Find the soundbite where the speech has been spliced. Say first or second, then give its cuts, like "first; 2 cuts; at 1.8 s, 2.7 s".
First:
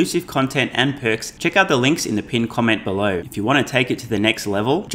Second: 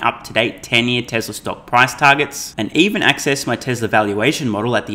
first; 2 cuts; at 1.3 s, 3.3 s